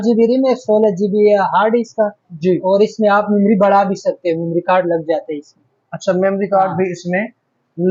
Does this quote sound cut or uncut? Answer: uncut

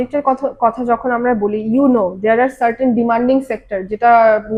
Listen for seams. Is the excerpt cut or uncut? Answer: uncut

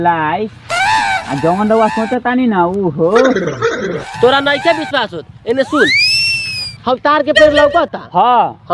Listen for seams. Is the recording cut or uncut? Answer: cut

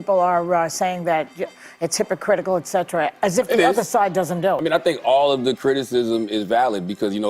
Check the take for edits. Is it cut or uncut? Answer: cut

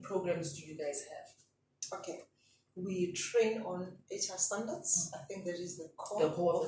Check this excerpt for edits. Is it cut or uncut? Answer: uncut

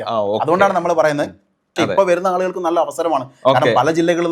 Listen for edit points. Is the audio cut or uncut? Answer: cut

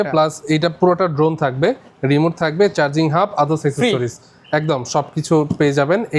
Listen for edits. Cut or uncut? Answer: uncut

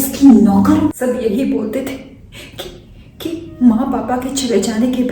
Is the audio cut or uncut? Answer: cut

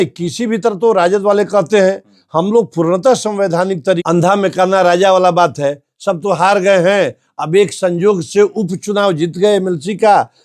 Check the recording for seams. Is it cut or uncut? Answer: cut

